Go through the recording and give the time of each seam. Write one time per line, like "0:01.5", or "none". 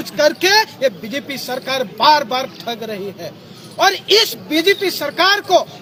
none